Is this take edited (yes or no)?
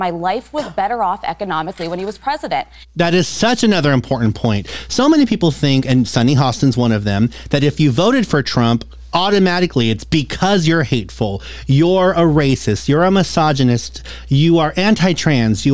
no